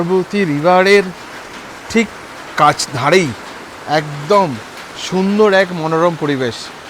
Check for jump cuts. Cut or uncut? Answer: uncut